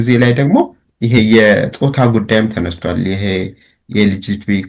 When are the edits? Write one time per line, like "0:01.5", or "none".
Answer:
none